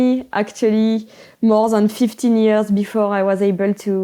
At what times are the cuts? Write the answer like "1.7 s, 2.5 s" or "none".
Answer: none